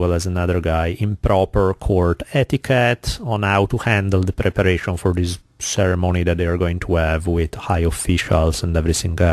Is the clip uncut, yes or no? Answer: no